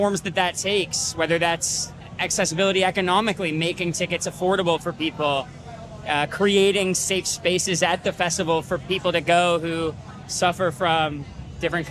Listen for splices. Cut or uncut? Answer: uncut